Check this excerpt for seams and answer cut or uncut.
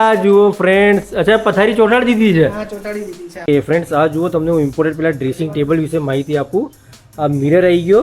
cut